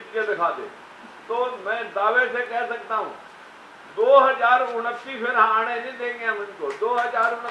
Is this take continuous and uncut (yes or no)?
yes